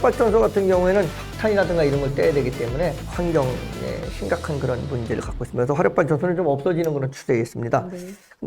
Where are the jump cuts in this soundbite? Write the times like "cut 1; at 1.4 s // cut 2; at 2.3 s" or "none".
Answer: cut 1; at 1.2 s // cut 2; at 3.0 s